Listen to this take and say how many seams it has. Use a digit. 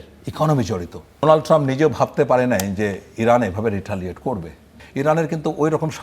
2